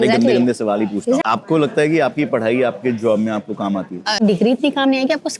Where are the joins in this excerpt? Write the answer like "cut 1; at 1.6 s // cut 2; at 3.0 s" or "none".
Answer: cut 1; at 1.2 s // cut 2; at 4.2 s